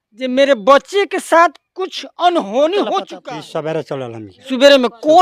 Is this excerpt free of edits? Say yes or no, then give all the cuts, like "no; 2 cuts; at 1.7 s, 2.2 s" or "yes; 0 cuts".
no; 1 cut; at 3.1 s